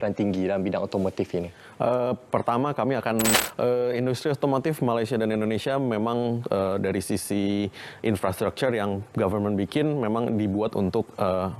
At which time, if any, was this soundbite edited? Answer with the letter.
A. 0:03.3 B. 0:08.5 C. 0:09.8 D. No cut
A